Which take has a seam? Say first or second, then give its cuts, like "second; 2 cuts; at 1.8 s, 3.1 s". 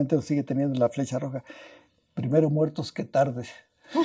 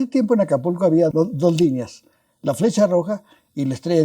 second; 1 cut; at 1.1 s